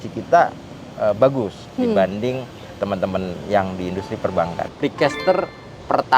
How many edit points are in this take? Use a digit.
1